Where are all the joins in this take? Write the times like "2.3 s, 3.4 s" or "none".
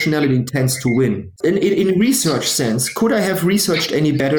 1.3 s